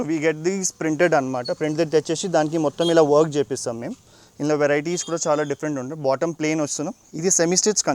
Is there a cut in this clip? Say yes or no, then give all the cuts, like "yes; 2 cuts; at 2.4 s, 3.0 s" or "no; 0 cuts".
no; 0 cuts